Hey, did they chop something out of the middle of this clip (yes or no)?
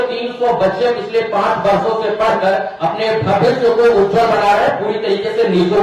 no